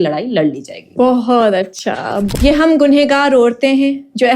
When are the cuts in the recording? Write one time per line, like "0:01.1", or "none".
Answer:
0:02.3